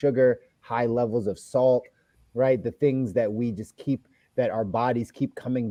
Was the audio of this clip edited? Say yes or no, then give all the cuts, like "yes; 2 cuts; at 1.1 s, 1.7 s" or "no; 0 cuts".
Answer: no; 0 cuts